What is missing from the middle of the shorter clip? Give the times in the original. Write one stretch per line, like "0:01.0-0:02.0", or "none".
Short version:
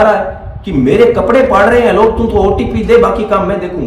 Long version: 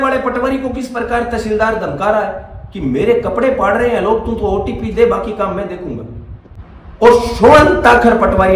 none